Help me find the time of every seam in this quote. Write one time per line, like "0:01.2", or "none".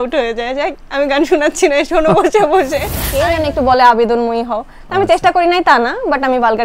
0:03.0